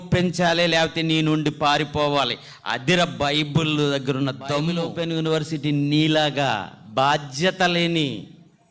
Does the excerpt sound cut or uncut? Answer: cut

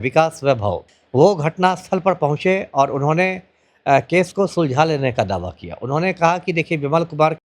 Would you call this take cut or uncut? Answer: cut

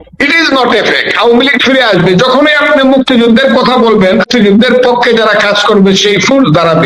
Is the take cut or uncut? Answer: cut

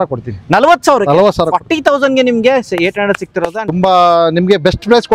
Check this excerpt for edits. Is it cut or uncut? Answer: cut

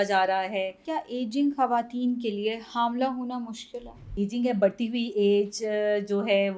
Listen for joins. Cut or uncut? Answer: cut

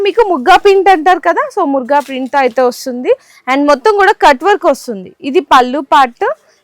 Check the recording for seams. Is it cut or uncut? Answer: uncut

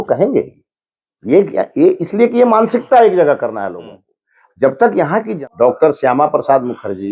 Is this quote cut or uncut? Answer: cut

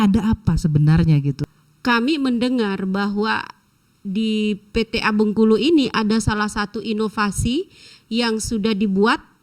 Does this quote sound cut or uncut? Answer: cut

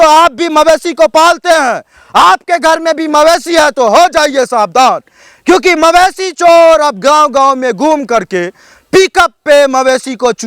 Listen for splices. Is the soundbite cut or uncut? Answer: uncut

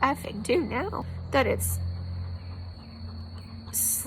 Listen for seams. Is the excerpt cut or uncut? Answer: cut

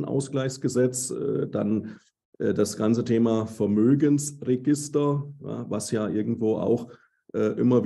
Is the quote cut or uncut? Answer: uncut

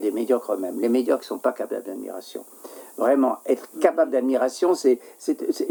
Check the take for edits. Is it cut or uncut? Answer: uncut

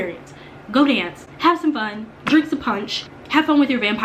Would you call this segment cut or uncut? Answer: cut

